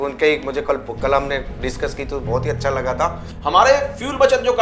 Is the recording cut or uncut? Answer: cut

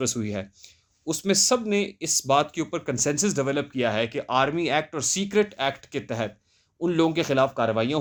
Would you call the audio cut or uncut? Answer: uncut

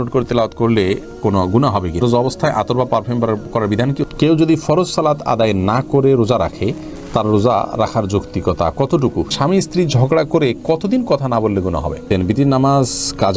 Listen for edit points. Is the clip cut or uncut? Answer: cut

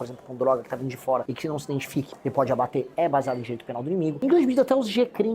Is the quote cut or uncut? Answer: cut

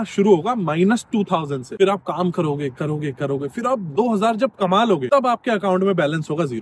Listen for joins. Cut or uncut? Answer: uncut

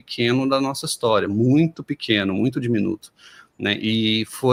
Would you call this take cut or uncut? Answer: uncut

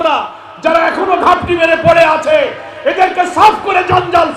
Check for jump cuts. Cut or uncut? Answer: uncut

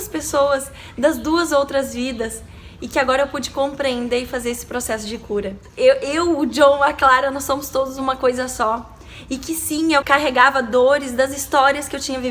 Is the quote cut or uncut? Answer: cut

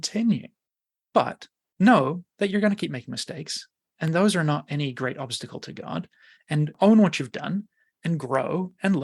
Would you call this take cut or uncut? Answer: cut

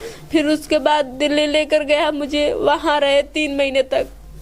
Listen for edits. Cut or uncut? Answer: uncut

